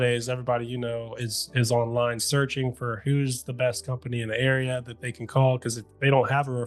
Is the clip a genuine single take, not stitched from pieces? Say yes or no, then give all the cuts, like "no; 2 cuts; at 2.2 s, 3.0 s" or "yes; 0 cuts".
yes; 0 cuts